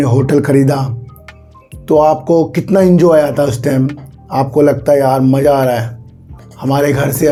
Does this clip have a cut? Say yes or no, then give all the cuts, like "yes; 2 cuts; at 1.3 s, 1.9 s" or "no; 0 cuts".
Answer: no; 0 cuts